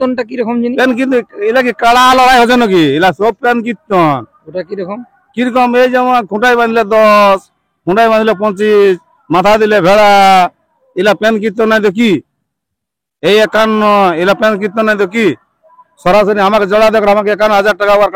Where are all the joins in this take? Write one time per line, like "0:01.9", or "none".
none